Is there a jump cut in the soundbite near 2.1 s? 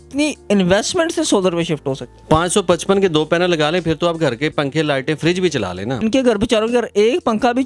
yes; 2 cuts; at 2.1 s, 6.0 s

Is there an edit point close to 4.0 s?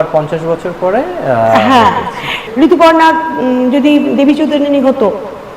no; 1 cut; at 2.4 s

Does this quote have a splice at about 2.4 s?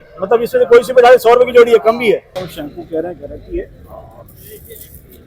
yes; 1 cut; at 2.4 s

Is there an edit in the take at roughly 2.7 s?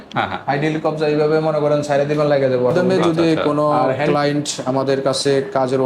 yes; 1 cut; at 2.7 s

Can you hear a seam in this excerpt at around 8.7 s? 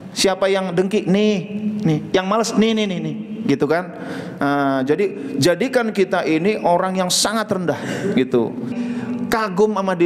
yes; 1 cut; at 8.7 s

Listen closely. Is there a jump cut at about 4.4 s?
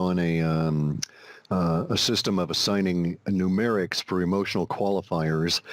no; 1 cut; at 2.0 s

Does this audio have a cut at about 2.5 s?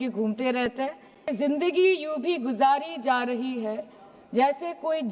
no; 1 cut; at 1.3 s

